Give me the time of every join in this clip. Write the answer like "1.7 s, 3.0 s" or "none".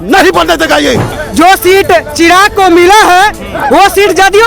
1.1 s

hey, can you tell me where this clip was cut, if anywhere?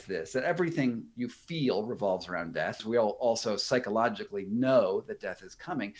2.8 s

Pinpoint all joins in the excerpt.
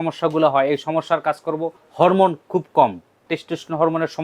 1.8 s, 3.2 s

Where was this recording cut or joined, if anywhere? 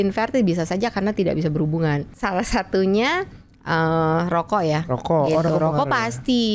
2.1 s

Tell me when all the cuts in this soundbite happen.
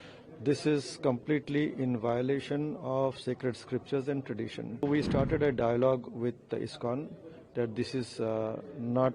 4.8 s

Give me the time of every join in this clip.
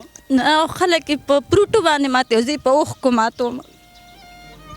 none

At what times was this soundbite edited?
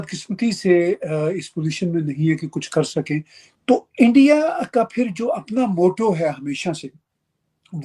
3.4 s

